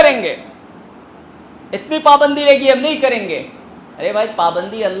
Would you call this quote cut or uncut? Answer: uncut